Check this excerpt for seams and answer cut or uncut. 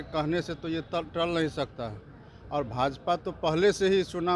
uncut